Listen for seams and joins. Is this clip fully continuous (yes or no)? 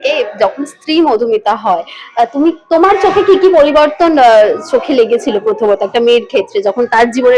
yes